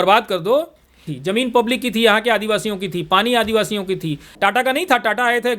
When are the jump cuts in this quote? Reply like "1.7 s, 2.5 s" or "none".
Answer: 1.1 s, 4.2 s